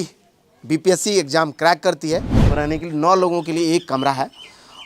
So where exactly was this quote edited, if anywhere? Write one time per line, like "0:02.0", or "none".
0:02.4